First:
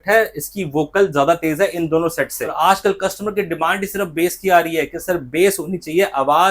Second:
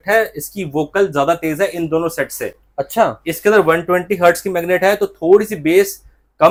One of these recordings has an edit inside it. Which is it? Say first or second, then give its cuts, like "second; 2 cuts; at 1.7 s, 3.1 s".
first; 1 cut; at 2.5 s